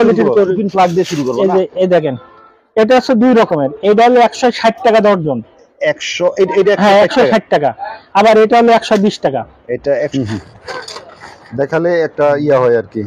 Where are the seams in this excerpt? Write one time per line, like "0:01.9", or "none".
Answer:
0:10.1